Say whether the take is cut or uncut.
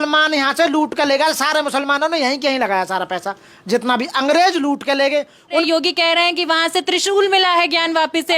cut